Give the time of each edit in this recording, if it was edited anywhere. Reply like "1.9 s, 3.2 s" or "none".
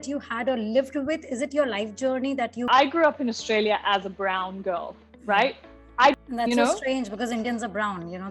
2.7 s, 6.2 s

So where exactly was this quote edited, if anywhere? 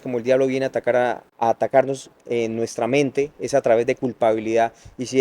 1.3 s

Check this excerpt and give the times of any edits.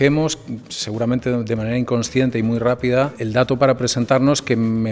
none

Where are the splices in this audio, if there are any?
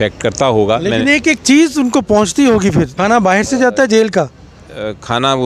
2.9 s

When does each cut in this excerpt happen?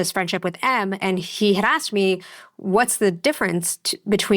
1.0 s

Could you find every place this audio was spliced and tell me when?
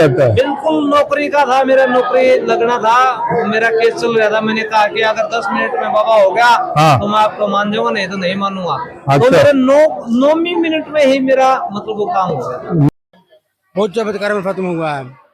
12.9 s

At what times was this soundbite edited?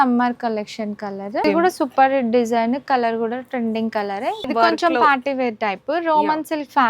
1.4 s, 4.5 s

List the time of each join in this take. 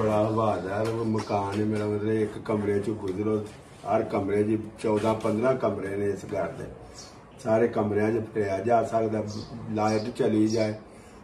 none

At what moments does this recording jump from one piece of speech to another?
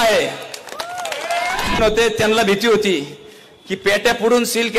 1.8 s

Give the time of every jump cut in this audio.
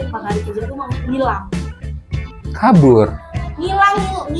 none

